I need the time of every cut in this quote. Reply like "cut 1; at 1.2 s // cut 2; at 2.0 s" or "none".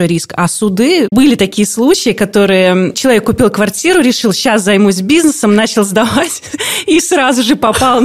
cut 1; at 1.1 s